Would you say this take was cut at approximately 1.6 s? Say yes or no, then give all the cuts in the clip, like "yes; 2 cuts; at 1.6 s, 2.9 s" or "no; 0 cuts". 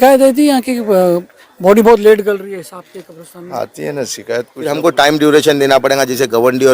no; 1 cut; at 4.6 s